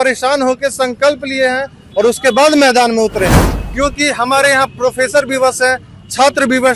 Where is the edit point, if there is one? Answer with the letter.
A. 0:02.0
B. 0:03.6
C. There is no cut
B